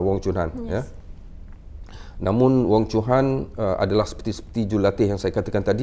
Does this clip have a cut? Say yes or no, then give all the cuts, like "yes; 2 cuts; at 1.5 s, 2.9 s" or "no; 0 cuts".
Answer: no; 0 cuts